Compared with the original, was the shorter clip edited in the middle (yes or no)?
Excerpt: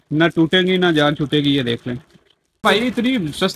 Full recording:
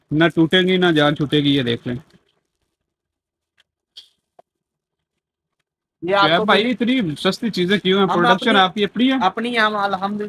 yes